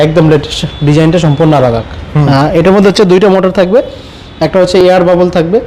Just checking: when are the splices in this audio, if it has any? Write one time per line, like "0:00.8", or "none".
none